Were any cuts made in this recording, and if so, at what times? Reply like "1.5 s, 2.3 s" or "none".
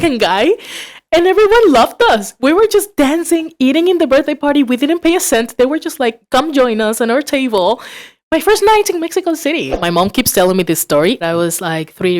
9.7 s, 11.2 s